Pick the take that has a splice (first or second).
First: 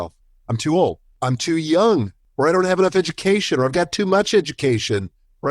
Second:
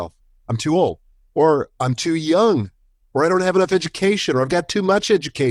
first